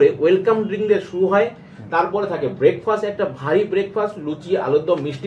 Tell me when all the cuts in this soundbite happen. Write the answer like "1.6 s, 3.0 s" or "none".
none